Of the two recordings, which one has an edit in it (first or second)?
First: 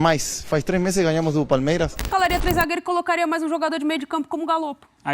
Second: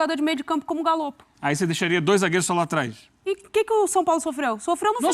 first